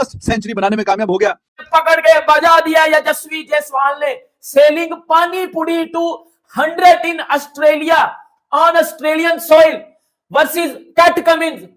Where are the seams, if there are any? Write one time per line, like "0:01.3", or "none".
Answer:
0:01.5

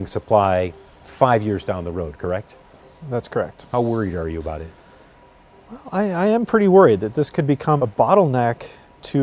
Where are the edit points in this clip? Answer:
none

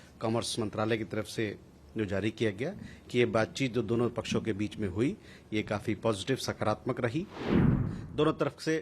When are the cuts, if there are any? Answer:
0:07.7

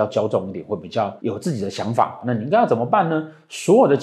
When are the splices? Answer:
none

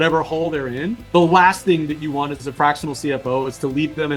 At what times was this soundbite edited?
0:01.0

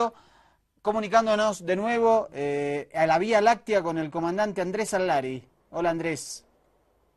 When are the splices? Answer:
none

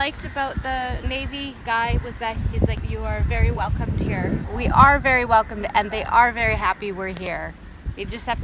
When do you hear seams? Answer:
0:01.6
0:02.7
0:04.5

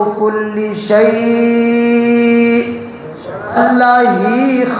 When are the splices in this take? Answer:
0:03.6

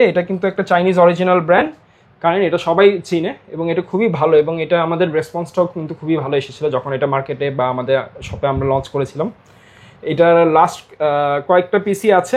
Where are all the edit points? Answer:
none

